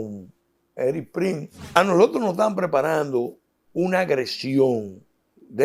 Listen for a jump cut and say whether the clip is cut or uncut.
cut